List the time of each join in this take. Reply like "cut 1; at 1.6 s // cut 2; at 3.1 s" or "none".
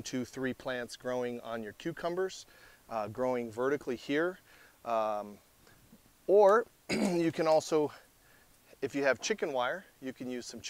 none